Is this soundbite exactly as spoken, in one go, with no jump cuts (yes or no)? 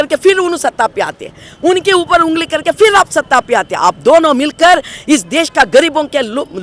yes